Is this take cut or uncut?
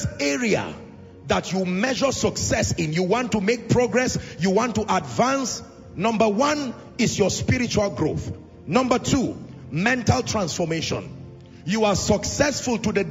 uncut